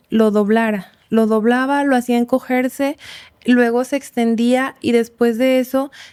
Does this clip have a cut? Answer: no; 0 cuts

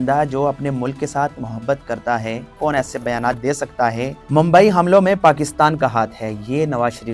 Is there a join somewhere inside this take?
yes; 2 cuts; at 2.5 s, 4.2 s

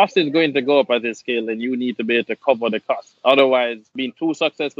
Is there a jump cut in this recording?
yes; 1 cut; at 3.9 s

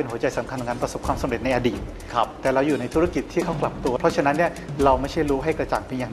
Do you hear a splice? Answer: yes; 2 cuts; at 1.9 s, 4.0 s

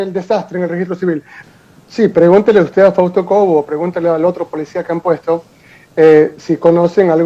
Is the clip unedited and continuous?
yes; 0 cuts

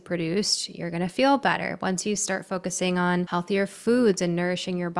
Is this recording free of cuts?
no; 1 cut; at 3.3 s

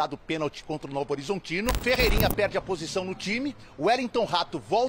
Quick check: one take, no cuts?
no; 1 cut; at 1.8 s

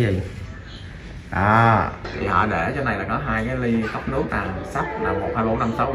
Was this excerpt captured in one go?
no; 1 cut; at 2.0 s

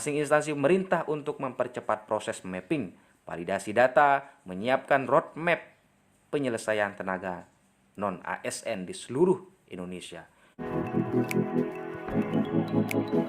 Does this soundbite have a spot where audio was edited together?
yes; 1 cut; at 10.5 s

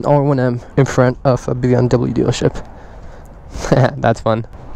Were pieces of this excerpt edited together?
no; 0 cuts

